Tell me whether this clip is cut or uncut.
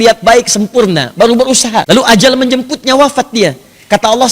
cut